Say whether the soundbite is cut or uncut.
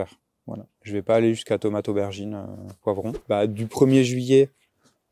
cut